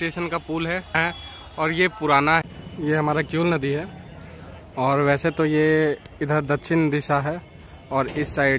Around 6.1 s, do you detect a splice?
no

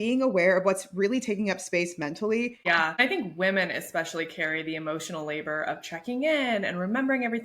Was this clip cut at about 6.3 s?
no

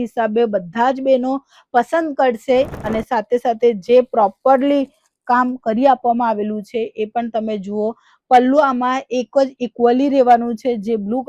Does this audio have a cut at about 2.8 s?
yes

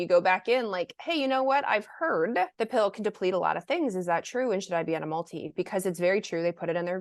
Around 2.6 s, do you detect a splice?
yes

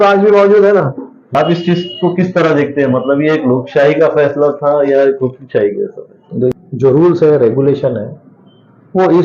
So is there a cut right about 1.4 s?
yes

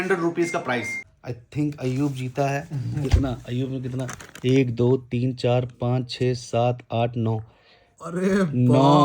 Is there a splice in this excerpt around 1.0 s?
yes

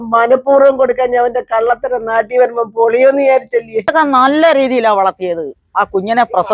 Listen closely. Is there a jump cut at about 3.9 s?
yes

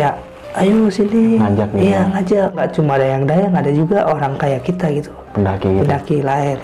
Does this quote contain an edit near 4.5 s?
no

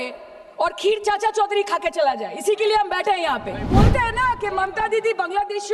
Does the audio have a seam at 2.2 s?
no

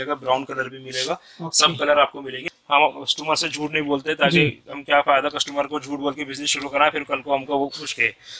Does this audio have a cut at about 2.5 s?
yes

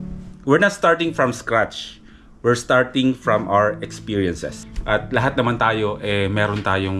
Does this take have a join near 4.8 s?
yes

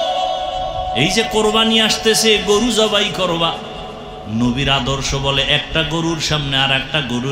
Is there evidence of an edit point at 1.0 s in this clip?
yes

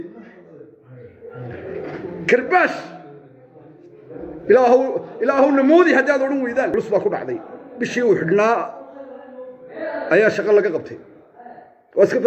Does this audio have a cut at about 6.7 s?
yes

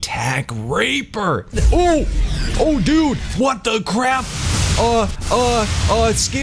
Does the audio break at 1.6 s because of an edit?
yes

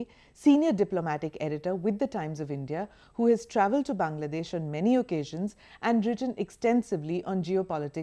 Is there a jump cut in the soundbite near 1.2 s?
yes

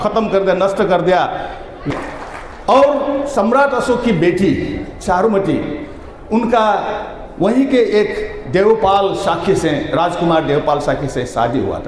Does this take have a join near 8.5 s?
no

